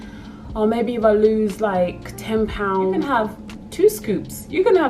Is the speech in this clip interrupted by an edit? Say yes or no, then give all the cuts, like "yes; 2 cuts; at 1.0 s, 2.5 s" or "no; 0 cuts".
yes; 1 cut; at 3.1 s